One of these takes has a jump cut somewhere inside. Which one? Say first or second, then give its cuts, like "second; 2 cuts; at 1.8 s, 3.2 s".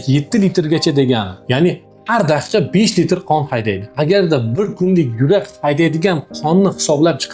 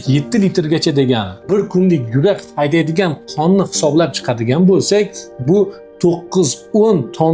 second; 1 cut; at 1.4 s